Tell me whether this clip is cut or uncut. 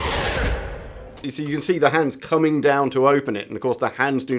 cut